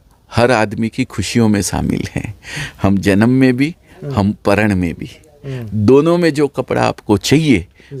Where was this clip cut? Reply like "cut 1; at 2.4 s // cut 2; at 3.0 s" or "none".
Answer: none